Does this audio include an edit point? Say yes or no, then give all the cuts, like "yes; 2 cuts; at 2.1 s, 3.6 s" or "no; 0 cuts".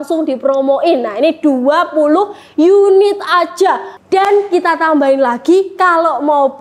yes; 1 cut; at 3.9 s